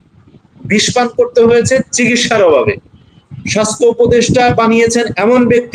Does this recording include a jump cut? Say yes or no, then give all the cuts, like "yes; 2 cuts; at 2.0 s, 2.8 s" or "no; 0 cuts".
no; 0 cuts